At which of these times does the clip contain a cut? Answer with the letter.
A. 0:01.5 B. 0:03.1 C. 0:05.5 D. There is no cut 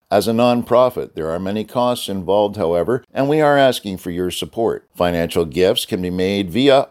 B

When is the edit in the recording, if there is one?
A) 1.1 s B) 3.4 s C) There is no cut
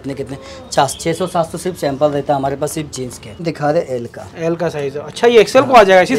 B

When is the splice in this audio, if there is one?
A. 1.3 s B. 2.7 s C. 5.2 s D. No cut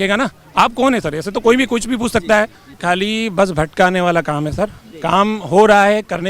B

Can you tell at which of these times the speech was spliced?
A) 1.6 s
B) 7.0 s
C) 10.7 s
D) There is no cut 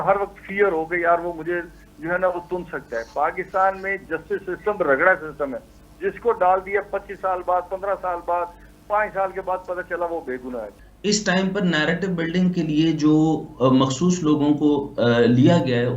C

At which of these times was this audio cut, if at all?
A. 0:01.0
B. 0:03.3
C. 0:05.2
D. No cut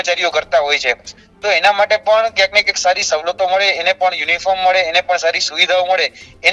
D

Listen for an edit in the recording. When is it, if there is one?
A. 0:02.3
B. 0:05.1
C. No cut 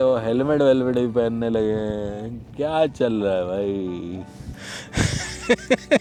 C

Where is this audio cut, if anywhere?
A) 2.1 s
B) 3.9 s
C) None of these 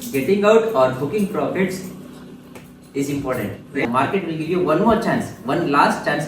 B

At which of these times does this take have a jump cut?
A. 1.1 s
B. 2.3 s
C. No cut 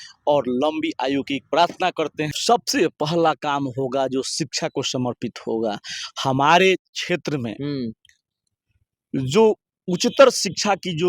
B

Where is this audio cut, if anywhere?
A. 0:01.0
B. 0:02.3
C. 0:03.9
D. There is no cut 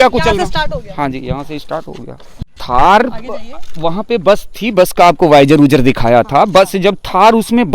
B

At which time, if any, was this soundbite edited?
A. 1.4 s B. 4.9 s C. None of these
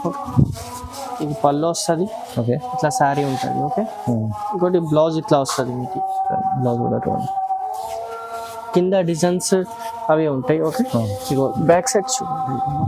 C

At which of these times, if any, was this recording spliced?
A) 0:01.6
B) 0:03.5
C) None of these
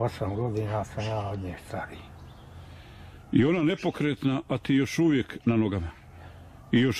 C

